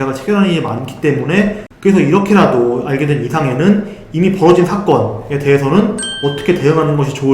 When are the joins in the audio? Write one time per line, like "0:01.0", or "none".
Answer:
0:01.7